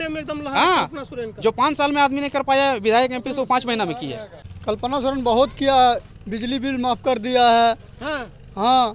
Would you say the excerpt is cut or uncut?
cut